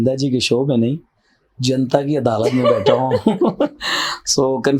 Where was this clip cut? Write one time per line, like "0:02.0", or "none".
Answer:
none